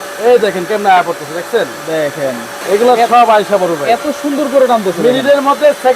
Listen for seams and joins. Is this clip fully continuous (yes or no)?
no